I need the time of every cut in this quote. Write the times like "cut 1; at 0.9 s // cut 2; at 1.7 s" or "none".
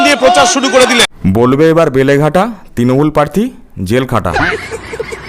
cut 1; at 1.1 s // cut 2; at 4.3 s